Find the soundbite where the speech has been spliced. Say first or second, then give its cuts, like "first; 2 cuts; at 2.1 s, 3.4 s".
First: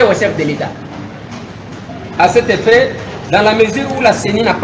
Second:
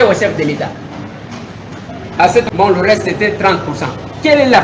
second; 1 cut; at 2.4 s